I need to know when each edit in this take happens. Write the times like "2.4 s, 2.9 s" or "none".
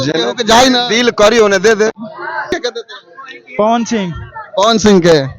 2.5 s